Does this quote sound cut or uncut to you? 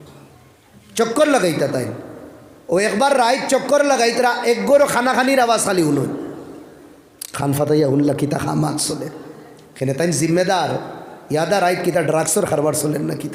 uncut